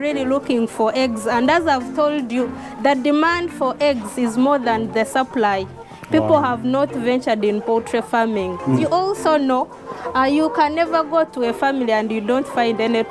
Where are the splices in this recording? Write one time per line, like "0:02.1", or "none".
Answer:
0:08.8